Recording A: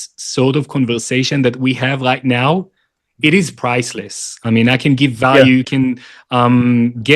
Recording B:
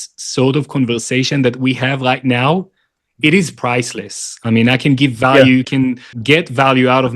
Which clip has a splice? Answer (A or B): B